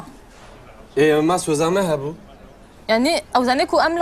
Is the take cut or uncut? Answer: uncut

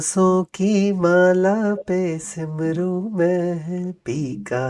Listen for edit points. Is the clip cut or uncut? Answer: uncut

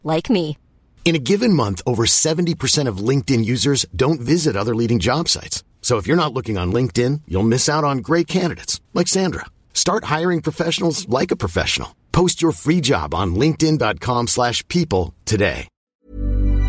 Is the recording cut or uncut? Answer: cut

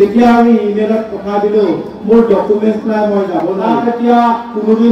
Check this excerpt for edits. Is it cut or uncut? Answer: cut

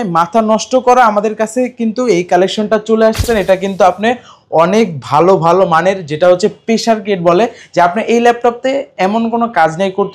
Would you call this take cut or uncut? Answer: cut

